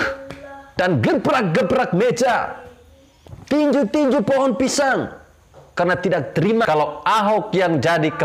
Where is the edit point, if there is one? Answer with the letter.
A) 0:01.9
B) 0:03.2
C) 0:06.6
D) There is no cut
C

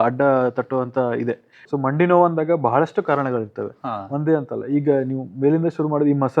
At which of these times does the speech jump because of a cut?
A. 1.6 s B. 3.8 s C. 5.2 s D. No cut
A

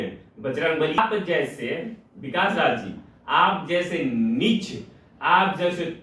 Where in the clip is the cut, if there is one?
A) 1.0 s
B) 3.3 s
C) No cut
A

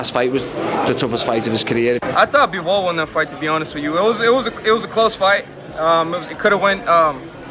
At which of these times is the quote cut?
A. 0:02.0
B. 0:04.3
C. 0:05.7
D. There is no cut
A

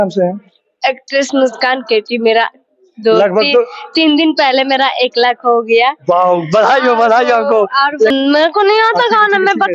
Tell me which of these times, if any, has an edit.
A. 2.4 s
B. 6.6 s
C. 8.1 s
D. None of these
C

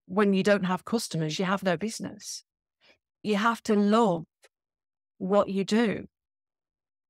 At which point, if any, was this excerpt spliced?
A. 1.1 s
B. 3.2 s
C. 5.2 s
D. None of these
B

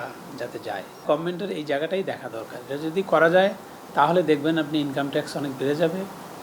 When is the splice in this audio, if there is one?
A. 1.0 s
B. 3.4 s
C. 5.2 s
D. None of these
A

